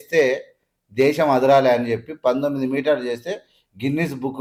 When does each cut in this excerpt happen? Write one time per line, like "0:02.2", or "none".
none

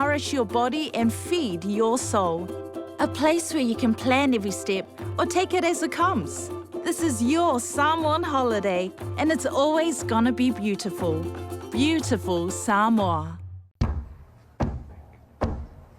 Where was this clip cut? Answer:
0:13.8

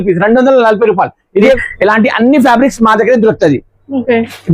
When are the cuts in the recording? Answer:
0:01.6

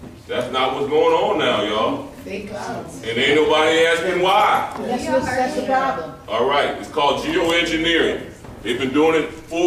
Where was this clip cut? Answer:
none

